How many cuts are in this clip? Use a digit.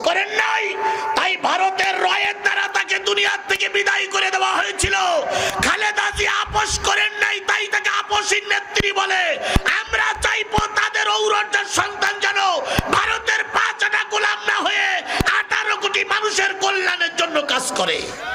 0